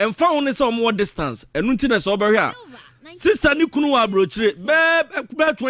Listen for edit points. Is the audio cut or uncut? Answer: uncut